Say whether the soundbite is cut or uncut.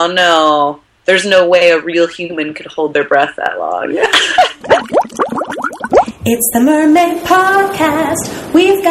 cut